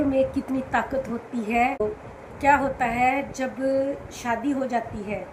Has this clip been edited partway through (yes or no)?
no